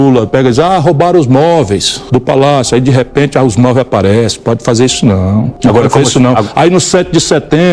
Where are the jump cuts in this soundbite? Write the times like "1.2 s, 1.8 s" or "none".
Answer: 1.9 s, 5.5 s